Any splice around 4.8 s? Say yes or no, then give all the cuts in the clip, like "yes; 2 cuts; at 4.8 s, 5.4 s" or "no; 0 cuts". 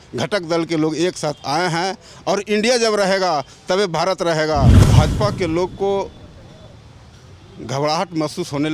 yes; 1 cut; at 4.8 s